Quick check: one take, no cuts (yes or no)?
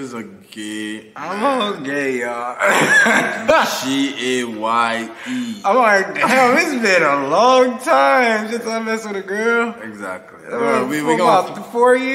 yes